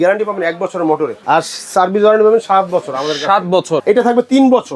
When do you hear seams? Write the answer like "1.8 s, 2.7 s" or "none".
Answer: 1.2 s, 3.8 s

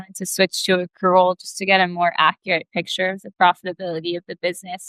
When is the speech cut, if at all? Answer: none

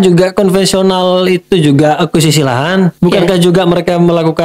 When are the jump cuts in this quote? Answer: 2.9 s

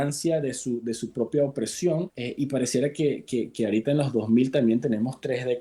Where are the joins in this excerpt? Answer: 2.2 s

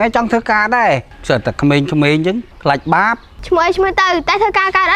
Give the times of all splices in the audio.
1.1 s, 3.3 s

